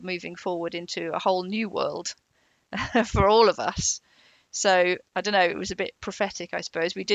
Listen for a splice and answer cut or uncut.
uncut